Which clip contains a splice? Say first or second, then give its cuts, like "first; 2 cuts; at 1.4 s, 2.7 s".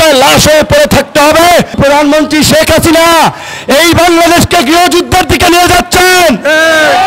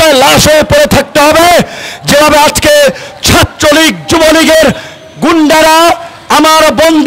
first; 1 cut; at 1.8 s